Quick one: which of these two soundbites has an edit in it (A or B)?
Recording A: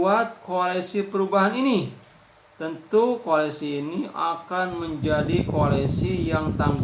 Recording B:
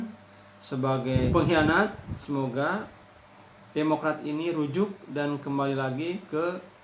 B